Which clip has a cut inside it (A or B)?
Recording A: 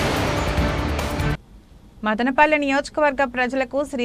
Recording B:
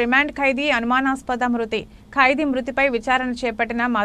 A